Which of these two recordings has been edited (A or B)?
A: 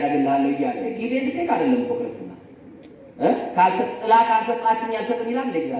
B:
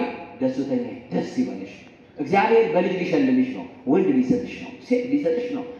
A